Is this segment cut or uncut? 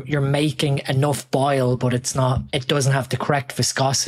cut